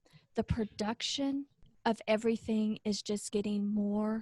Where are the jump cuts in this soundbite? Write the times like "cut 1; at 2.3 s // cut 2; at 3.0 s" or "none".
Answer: cut 1; at 1.6 s